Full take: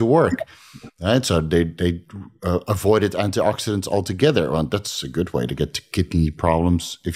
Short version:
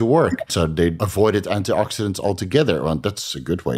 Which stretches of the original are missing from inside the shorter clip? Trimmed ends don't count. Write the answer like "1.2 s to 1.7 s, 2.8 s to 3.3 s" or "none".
1.0 s to 2.6 s